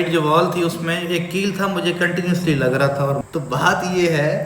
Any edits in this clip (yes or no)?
yes